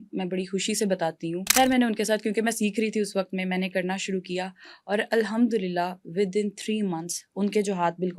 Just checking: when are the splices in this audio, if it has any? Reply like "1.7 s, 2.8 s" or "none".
1.4 s